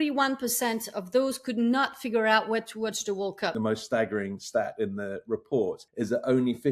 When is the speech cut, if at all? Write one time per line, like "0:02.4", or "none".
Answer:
0:03.5
0:05.8